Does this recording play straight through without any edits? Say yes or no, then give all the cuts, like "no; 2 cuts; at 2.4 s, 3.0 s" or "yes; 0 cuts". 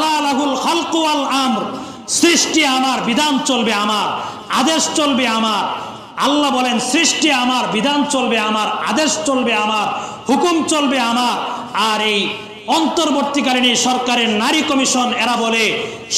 yes; 0 cuts